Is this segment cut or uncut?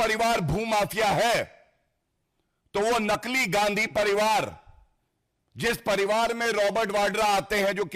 uncut